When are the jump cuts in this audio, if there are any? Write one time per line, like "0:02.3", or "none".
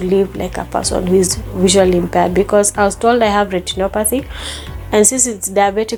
none

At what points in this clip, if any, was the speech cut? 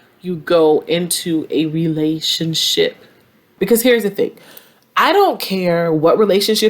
0:03.5

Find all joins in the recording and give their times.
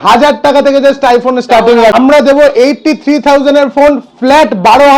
0:01.9

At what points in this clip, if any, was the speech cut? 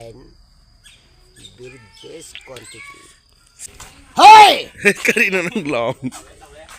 0:03.6

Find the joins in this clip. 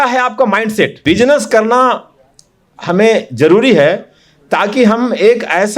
0:01.0

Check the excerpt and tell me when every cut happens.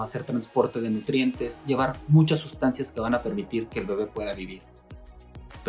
none

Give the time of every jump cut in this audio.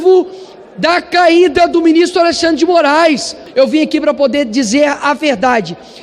0:03.4

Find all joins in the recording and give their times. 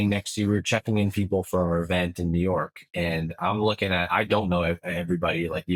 none

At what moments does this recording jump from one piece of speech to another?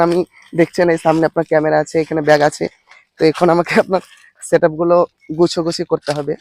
none

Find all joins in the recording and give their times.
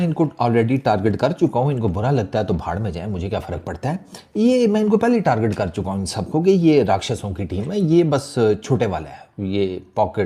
none

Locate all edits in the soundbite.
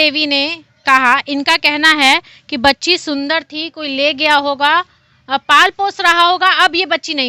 none

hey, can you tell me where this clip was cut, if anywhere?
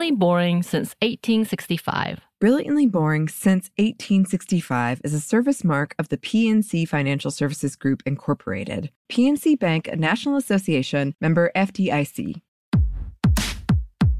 0:12.8

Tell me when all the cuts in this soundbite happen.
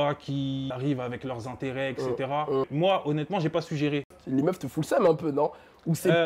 0:00.7
0:02.7
0:04.1

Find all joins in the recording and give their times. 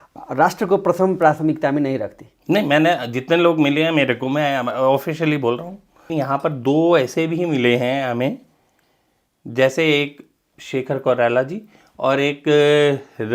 0:06.1

